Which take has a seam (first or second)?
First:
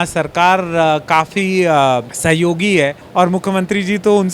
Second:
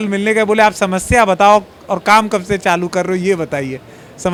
first